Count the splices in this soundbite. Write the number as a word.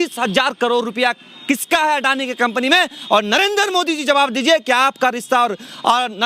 zero